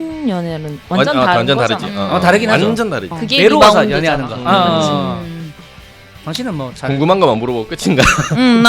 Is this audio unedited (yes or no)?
no